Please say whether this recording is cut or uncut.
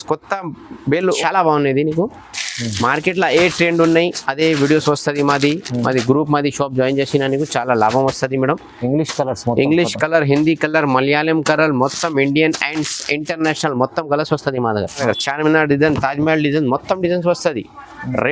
cut